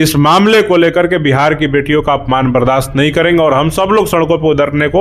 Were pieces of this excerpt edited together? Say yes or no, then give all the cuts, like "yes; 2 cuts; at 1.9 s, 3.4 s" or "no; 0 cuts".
no; 0 cuts